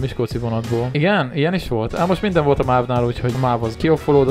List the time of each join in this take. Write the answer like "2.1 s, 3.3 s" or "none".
0.9 s, 3.4 s